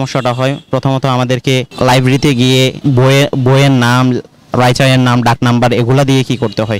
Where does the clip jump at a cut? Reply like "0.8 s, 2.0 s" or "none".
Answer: 1.7 s, 2.8 s